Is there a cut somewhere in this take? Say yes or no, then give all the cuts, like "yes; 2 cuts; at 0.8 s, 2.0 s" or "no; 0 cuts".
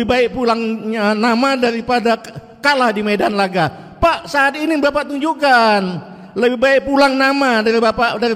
no; 0 cuts